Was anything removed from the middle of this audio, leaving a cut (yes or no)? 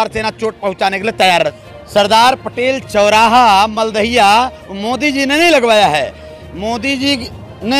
yes